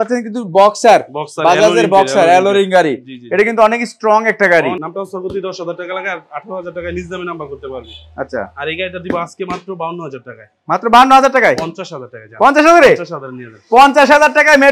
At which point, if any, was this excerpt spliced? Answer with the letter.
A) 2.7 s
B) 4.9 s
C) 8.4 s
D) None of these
B